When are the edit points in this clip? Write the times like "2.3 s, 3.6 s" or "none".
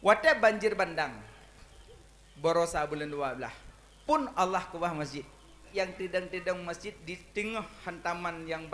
5.6 s

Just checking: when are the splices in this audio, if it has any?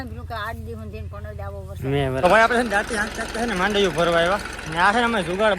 2.2 s

